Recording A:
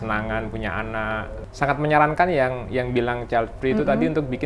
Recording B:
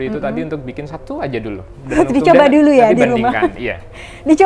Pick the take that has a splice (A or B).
A